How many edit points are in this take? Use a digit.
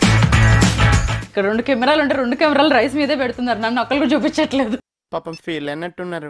1